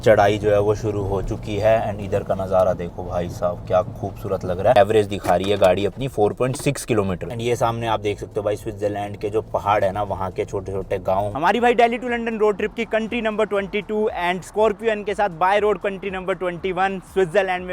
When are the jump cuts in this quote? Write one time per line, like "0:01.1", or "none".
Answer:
0:04.8
0:07.3
0:11.3